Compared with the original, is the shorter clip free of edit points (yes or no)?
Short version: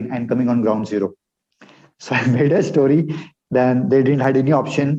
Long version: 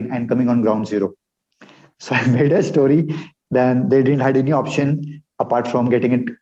yes